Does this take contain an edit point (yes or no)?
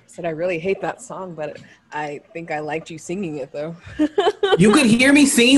yes